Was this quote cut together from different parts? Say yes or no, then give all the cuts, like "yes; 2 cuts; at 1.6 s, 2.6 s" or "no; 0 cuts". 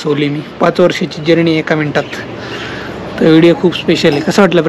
no; 0 cuts